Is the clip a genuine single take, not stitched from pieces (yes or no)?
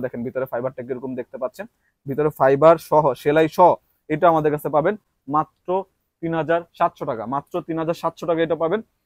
yes